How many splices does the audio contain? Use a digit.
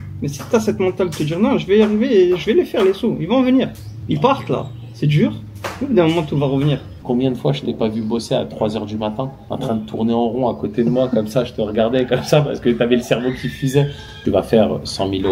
2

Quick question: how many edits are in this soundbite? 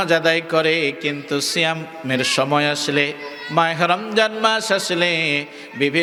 0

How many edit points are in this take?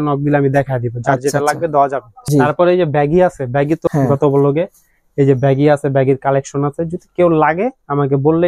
2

